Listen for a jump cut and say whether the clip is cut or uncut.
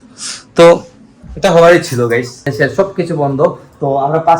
cut